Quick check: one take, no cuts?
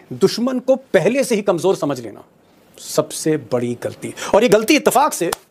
yes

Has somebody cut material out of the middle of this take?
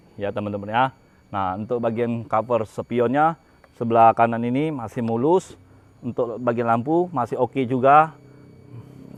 no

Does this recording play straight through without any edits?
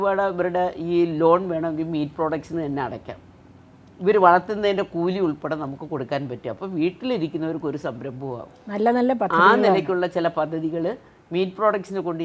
yes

